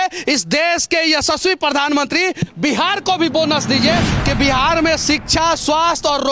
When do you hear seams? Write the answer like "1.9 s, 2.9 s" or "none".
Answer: 4.1 s